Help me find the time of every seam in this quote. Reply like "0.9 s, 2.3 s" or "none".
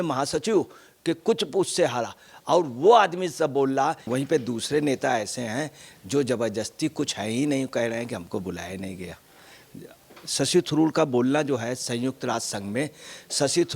4.0 s